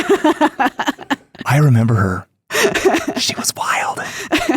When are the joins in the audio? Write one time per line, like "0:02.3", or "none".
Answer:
0:01.3